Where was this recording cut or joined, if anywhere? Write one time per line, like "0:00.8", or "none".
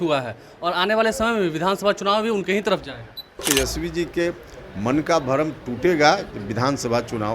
0:03.4